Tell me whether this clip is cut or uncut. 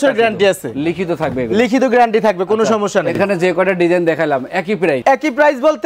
uncut